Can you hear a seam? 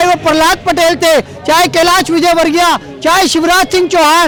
no; 0 cuts

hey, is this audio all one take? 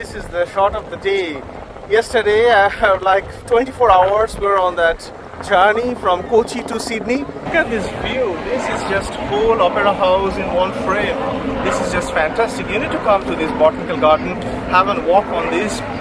no; 1 cut; at 7.4 s

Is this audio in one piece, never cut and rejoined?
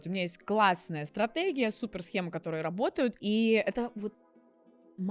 yes; 0 cuts

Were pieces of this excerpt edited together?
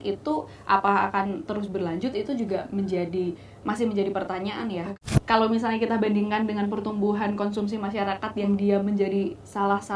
yes; 1 cut; at 4.9 s

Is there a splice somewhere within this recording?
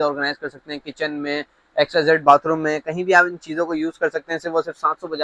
no; 0 cuts

